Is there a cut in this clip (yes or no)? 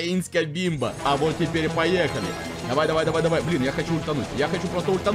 yes